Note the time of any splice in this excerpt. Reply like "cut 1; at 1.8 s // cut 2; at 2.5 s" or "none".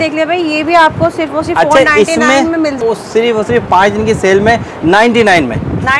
cut 1; at 2.8 s